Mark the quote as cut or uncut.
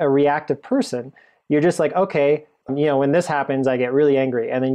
cut